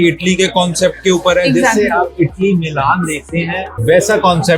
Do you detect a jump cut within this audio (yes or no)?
yes